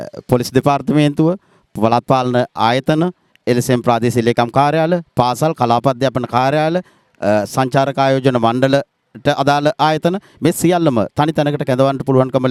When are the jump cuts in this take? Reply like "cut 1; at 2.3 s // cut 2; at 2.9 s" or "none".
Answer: none